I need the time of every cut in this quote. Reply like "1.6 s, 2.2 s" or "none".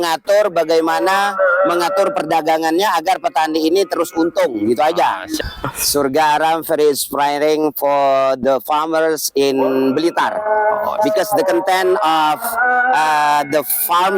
5.4 s

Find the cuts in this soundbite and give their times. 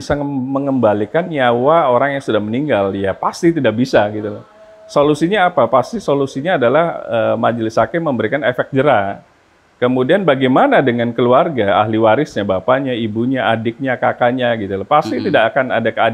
none

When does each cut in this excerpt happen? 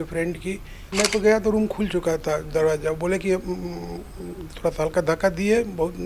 0.9 s

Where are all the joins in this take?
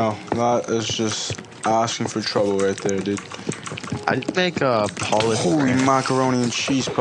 none

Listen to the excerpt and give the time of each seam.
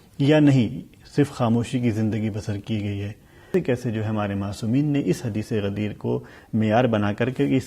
3.5 s

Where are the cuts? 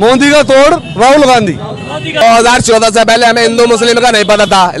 2.2 s

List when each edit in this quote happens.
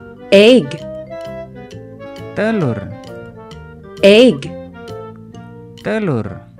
0.8 s, 2.3 s, 4.5 s, 5.8 s

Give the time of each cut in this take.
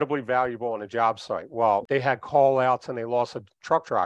1.8 s

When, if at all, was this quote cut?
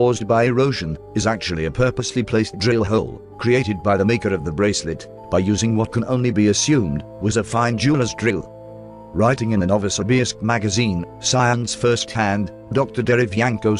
5.6 s

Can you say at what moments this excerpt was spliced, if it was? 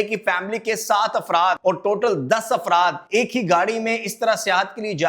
1.6 s, 3.0 s

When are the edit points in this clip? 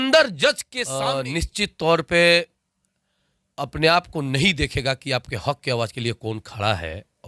1.0 s

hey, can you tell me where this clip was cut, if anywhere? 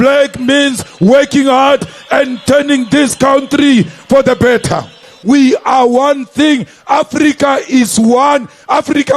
5.1 s

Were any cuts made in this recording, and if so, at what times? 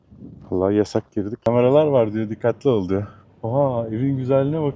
1.4 s

